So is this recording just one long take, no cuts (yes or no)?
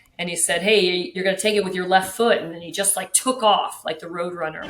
no